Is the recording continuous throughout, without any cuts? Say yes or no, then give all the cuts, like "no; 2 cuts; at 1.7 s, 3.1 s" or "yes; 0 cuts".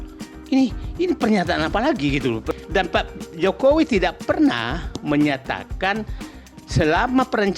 no; 1 cut; at 2.5 s